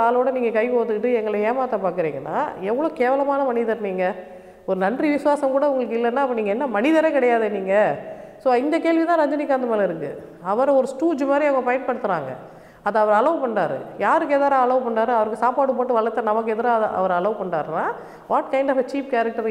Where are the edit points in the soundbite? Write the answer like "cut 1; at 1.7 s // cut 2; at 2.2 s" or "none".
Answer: none